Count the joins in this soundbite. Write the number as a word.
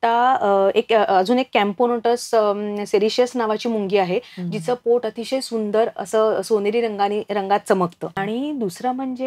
one